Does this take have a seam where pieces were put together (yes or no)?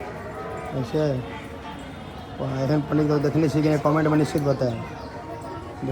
no